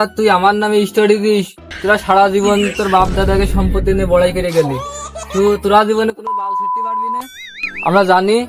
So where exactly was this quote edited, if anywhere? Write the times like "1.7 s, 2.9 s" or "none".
none